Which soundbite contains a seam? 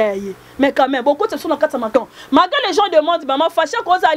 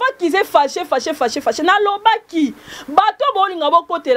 first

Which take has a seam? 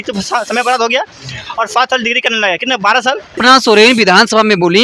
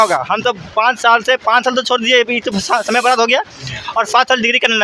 first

